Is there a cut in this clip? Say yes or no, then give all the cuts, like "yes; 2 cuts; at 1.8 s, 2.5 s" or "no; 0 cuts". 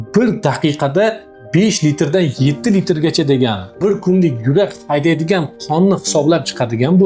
yes; 1 cut; at 3.7 s